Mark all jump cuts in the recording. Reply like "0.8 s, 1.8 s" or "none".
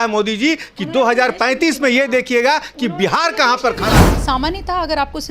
4.0 s